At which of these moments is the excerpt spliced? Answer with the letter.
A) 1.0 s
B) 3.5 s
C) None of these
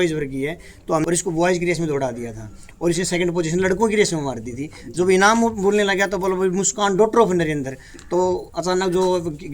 A